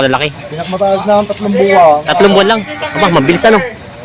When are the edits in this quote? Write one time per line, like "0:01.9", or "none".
none